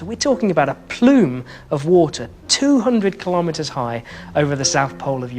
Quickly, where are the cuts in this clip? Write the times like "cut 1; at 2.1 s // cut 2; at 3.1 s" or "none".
none